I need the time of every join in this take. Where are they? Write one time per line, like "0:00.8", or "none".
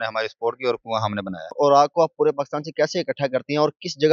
0:01.5